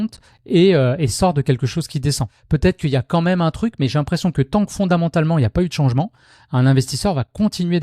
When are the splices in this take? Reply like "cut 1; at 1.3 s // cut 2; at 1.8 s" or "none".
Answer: cut 1; at 2.3 s